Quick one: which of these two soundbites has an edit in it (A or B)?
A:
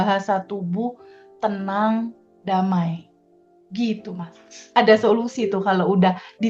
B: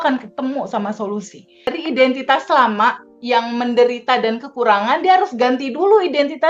B